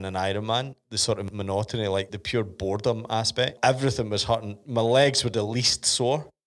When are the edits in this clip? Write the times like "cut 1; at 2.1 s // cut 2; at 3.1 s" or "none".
cut 1; at 0.9 s // cut 2; at 2.1 s // cut 3; at 3.5 s